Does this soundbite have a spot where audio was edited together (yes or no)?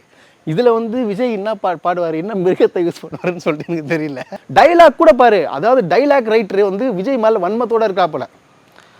yes